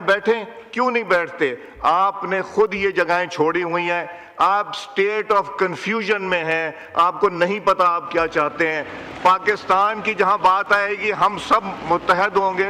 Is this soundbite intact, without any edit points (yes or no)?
yes